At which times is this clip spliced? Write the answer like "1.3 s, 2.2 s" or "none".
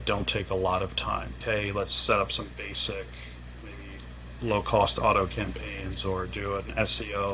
none